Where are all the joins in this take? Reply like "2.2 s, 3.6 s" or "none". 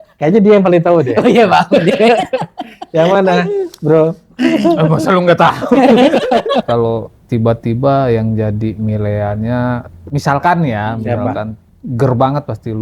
6.7 s

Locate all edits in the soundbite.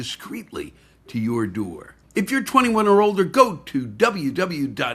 1.9 s

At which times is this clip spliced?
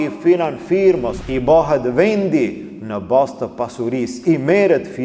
1.1 s, 4.1 s

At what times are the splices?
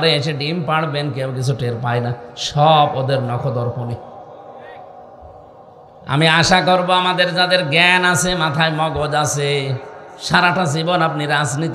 6.0 s

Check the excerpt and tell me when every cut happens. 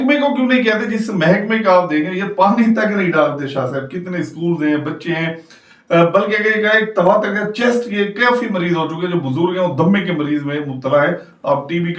none

